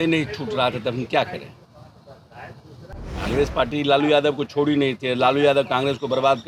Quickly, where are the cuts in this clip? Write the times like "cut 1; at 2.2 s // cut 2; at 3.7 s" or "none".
none

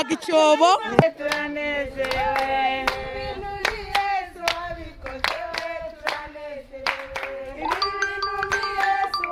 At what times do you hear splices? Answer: none

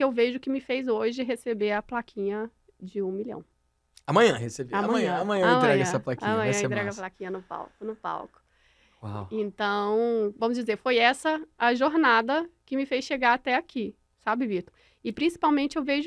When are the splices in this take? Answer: none

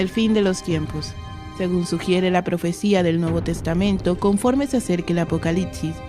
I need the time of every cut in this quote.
cut 1; at 3.6 s

